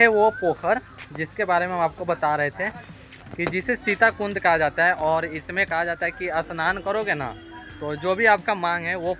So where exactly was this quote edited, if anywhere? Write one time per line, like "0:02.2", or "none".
none